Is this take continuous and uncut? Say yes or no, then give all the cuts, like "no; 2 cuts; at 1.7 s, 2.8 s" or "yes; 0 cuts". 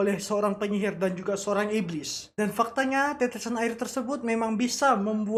yes; 0 cuts